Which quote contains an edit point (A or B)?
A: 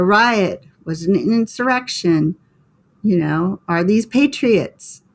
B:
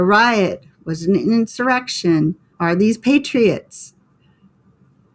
B